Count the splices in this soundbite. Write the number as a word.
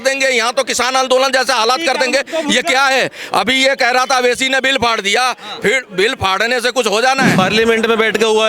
one